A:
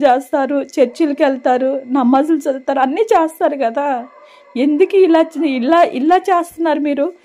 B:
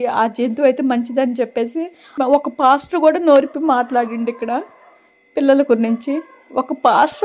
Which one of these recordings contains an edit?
B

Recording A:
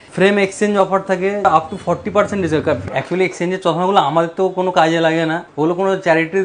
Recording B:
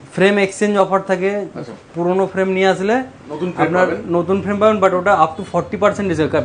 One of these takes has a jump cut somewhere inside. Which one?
A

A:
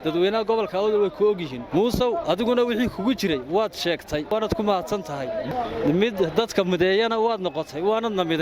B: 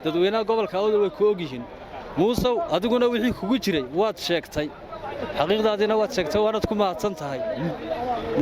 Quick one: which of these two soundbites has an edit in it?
A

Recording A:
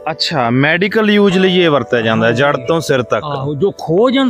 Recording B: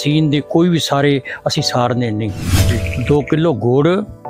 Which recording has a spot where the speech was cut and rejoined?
B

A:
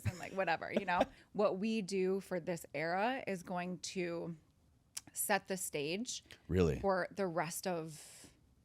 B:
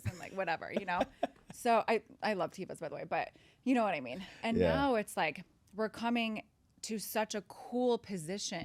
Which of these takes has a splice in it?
A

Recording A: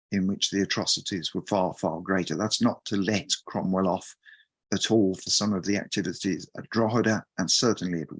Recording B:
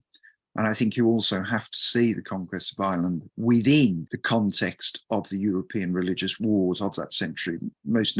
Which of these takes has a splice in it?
B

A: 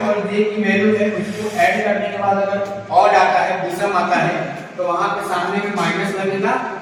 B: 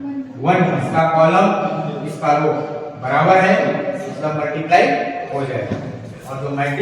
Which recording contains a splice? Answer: B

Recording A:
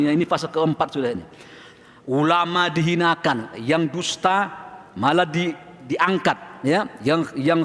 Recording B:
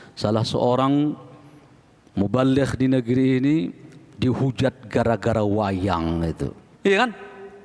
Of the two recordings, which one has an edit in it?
B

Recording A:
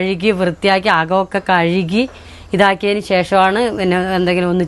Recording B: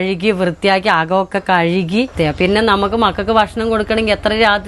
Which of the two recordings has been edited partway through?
B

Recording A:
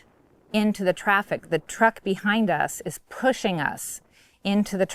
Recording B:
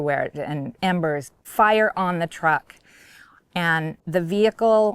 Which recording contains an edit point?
B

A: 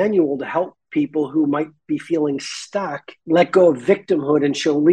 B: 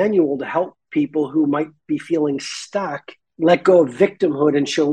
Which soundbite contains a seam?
A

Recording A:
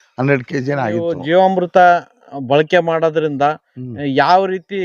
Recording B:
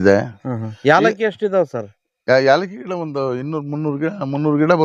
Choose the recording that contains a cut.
A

